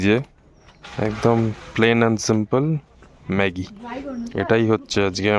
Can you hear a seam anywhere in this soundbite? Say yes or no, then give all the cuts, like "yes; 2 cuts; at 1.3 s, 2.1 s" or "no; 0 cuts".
no; 0 cuts